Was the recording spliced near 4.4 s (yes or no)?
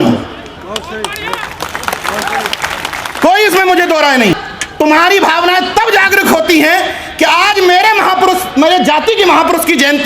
yes